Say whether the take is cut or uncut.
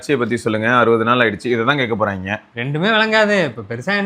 cut